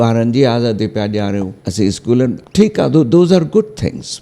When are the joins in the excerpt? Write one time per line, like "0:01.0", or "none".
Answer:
0:01.6
0:02.4